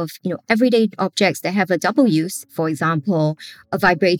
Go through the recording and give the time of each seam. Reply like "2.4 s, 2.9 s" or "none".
2.5 s